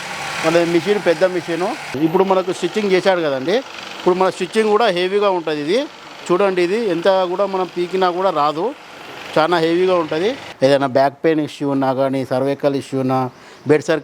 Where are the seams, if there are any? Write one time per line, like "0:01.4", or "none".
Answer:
0:01.8
0:10.4